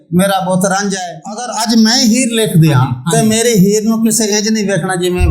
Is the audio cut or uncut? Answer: cut